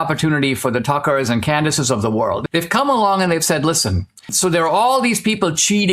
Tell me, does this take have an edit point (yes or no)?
yes